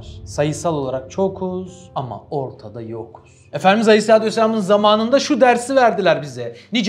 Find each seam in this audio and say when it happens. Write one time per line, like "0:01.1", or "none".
none